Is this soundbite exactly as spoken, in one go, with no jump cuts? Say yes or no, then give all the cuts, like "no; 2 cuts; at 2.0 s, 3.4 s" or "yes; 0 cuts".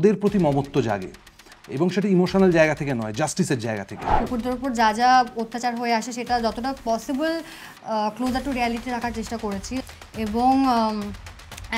no; 2 cuts; at 4.0 s, 9.9 s